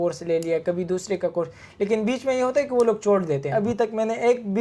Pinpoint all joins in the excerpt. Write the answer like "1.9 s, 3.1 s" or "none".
3.5 s